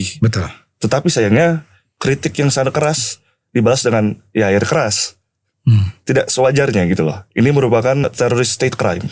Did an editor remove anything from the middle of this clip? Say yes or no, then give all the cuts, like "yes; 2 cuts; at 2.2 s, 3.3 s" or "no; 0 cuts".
yes; 1 cut; at 8.0 s